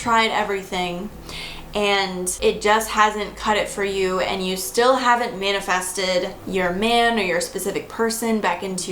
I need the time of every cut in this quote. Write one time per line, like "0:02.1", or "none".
0:02.3
0:06.4